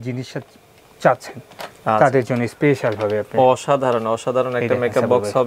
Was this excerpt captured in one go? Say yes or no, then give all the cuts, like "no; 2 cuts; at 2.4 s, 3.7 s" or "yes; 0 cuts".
yes; 0 cuts